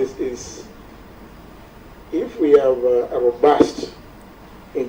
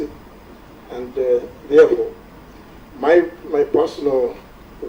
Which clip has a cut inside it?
second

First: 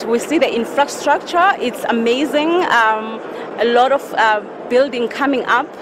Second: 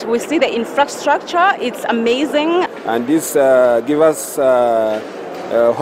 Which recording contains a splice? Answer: second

